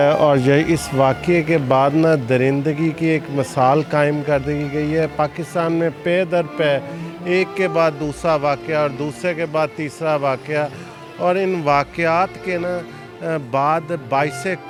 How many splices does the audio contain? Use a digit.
0